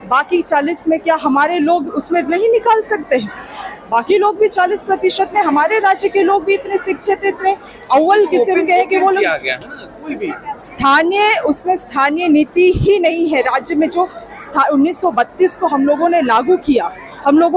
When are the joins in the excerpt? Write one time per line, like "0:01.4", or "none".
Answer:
none